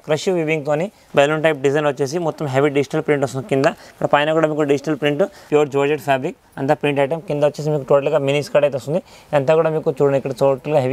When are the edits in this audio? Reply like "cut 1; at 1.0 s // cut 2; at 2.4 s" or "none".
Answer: cut 1; at 1.0 s // cut 2; at 5.4 s